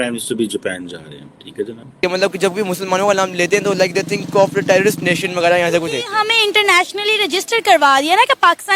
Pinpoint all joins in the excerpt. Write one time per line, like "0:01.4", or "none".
0:02.0